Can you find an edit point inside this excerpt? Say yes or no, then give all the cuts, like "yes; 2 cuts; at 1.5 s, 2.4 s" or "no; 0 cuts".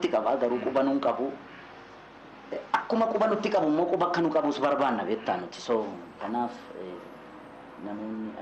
no; 0 cuts